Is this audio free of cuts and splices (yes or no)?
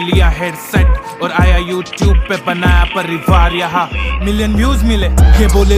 yes